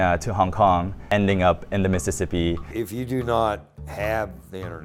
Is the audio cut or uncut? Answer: cut